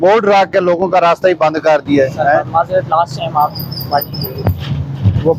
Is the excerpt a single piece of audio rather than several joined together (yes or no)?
yes